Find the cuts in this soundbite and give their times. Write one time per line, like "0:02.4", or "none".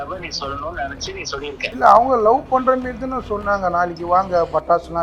0:01.8